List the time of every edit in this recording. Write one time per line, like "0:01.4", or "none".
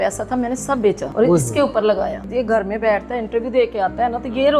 0:01.1
0:02.3